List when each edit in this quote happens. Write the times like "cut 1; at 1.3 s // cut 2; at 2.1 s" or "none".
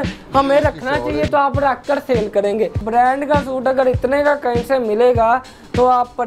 cut 1; at 2.8 s